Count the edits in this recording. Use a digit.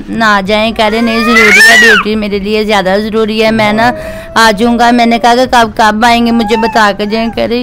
0